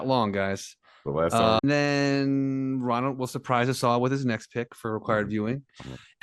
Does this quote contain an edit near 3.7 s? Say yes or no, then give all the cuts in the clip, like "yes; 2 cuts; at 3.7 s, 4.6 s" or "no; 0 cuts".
no; 1 cut; at 1.6 s